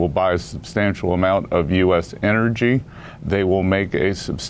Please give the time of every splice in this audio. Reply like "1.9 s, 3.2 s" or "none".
none